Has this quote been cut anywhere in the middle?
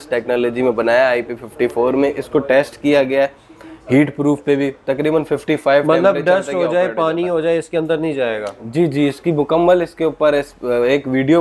no; 0 cuts

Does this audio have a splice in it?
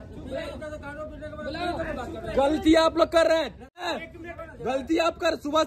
yes; 1 cut; at 4.0 s

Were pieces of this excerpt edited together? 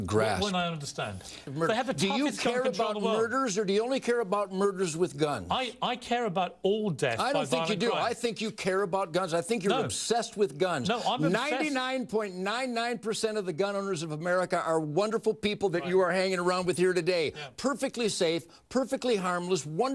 yes; 1 cut; at 1.4 s

